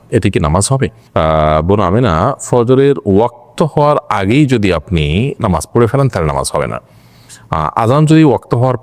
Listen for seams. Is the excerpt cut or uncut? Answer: uncut